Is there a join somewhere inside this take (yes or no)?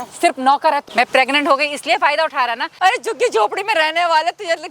yes